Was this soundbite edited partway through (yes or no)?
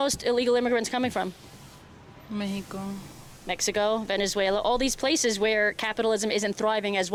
no